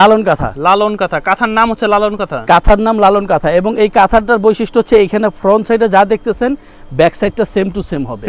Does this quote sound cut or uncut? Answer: uncut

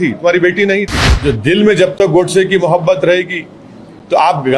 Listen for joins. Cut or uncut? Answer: cut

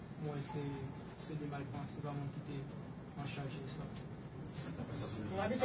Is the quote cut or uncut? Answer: cut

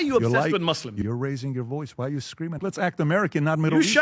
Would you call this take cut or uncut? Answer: cut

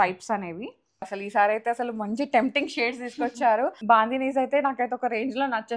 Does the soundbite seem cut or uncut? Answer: cut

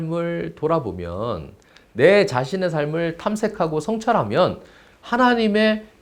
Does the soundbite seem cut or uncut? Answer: uncut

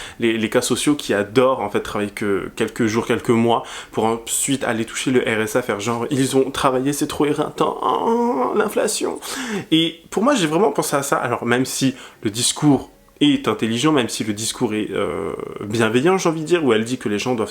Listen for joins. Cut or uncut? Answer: uncut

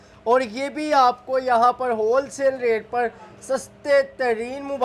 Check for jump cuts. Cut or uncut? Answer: uncut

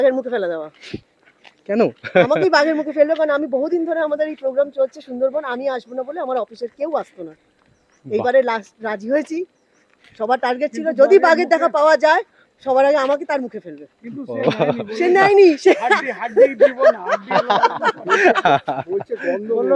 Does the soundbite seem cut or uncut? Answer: uncut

